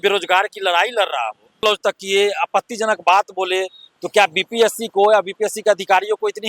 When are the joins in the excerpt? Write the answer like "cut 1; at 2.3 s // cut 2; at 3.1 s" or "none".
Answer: cut 1; at 1.6 s